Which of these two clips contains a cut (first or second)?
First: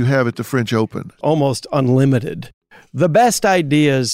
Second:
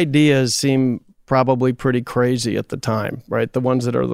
first